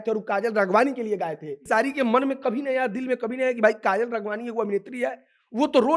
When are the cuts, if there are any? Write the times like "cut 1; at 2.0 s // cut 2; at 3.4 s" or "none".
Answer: cut 1; at 1.5 s